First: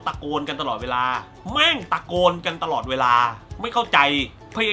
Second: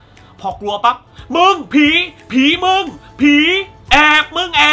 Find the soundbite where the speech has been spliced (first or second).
first